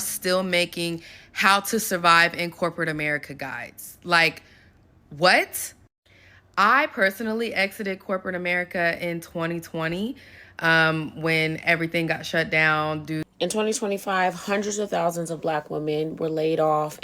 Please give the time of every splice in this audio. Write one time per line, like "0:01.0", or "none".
0:13.3